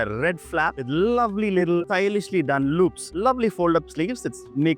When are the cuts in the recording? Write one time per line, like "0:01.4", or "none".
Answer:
0:01.9
0:03.1